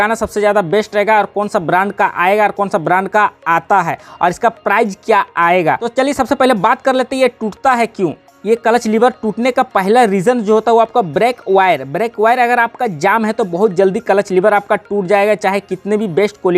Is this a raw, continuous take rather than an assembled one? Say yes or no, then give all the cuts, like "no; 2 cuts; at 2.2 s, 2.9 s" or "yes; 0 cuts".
yes; 0 cuts